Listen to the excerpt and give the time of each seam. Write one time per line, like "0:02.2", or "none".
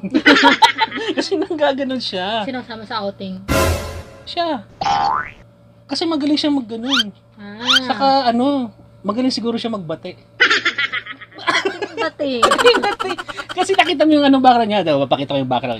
none